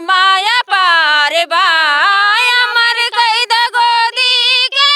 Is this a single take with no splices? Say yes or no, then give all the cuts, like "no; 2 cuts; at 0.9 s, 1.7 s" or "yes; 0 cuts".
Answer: yes; 0 cuts